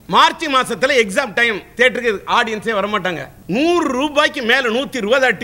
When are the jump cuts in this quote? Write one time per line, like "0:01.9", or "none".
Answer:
0:03.3